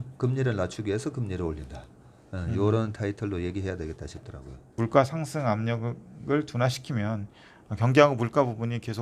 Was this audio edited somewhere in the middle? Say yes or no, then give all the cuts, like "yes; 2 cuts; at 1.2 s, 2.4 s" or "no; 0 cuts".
yes; 1 cut; at 4.6 s